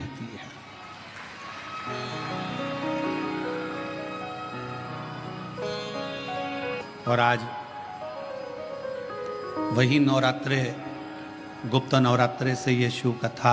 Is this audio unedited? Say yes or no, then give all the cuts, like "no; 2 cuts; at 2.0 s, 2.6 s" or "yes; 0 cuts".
no; 1 cut; at 6.8 s